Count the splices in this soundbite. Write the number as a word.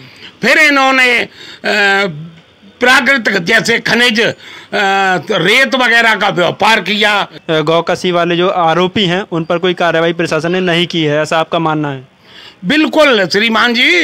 one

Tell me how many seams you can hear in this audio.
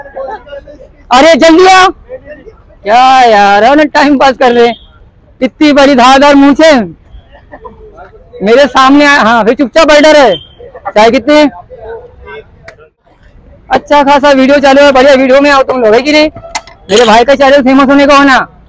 one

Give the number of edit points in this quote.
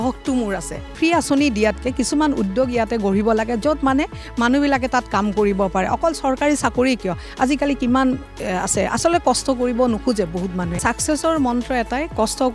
two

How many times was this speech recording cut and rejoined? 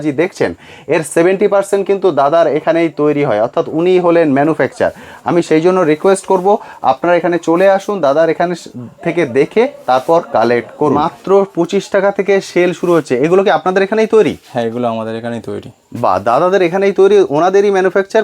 one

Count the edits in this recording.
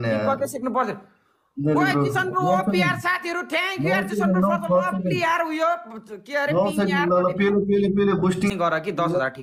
one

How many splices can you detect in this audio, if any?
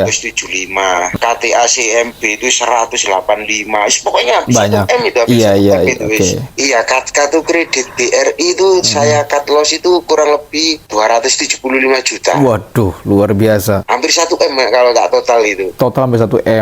three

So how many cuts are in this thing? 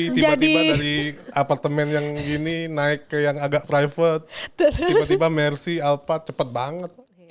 zero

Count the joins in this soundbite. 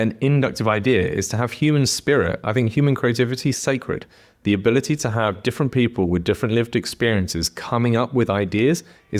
zero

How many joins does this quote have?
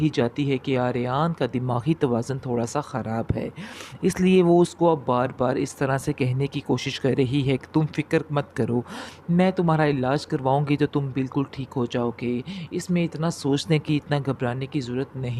zero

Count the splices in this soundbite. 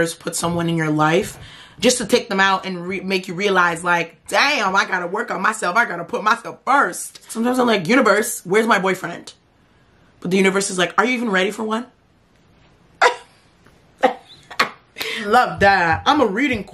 two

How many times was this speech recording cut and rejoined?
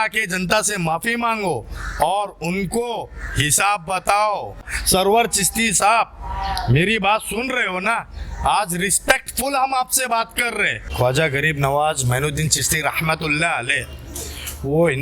two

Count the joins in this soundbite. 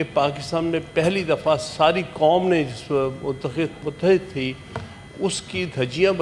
one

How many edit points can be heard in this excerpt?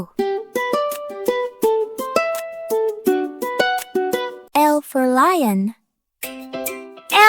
one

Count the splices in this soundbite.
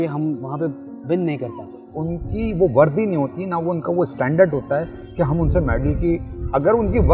one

